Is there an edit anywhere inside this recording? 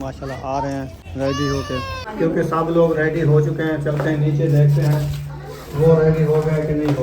yes; 2 cuts; at 1.0 s, 2.0 s

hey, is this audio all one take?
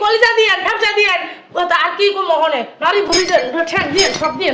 yes; 0 cuts

